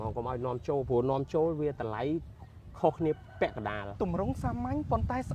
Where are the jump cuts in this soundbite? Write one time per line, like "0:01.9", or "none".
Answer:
0:03.9